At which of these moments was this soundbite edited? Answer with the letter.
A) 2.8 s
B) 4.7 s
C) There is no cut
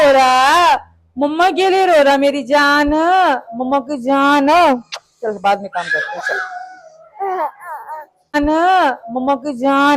C